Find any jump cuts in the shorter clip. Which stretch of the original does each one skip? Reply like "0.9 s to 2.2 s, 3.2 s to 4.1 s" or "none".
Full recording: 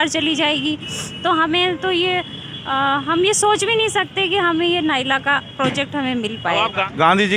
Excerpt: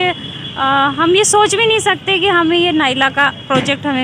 none